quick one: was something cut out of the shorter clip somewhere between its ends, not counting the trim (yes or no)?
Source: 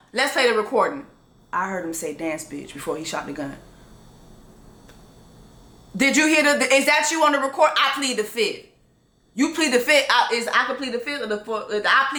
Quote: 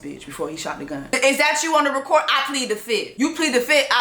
yes